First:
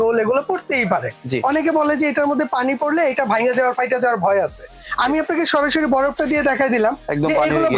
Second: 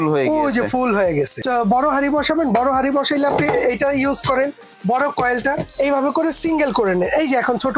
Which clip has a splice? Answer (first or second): second